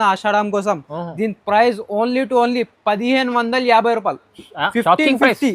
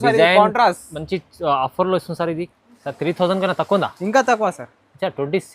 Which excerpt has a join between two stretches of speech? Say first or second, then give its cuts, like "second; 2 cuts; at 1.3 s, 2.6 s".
second; 1 cut; at 2.4 s